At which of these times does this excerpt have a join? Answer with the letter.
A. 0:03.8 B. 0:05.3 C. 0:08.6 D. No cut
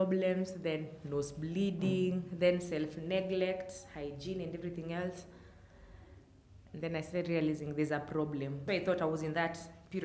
C